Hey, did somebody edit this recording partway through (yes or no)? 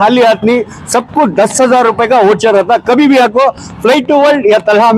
no